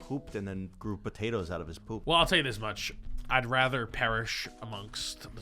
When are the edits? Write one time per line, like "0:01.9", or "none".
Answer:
0:02.0

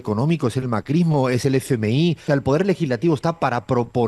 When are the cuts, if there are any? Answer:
0:02.2

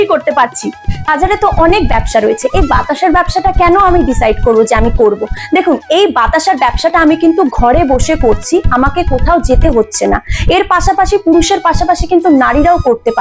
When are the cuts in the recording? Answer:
0:01.1

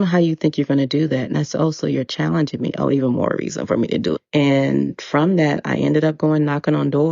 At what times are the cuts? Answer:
0:04.2

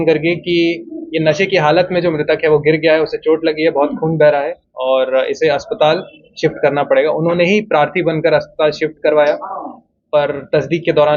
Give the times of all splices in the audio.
none

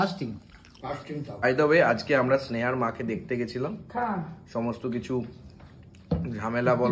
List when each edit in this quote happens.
0:01.4

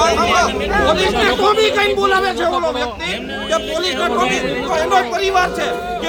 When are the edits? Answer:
none

